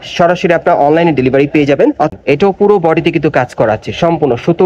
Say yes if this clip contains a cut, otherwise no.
yes